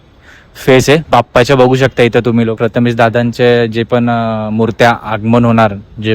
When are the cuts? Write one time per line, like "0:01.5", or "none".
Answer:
0:02.5